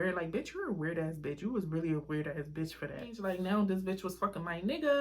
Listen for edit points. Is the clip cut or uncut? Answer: cut